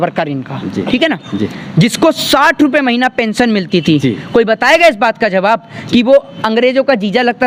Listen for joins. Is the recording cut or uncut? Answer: uncut